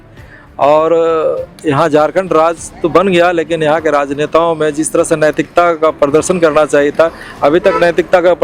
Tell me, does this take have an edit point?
no; 0 cuts

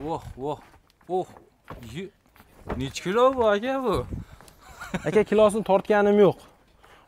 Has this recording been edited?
no; 0 cuts

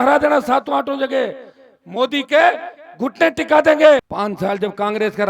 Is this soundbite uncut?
no; 1 cut; at 4.1 s

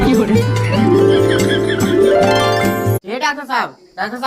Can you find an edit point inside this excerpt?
yes; 1 cut; at 3.0 s

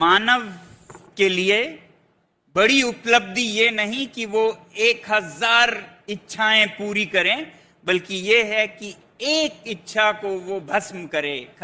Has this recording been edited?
no; 0 cuts

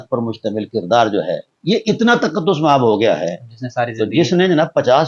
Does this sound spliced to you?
yes; 1 cut; at 1.5 s

